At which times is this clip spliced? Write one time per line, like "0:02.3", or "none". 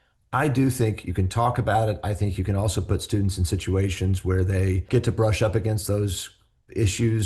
0:04.9